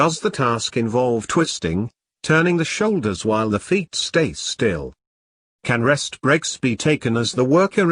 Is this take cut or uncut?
cut